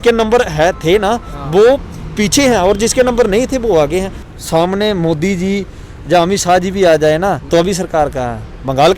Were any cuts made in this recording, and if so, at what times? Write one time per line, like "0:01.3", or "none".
0:04.3
0:07.4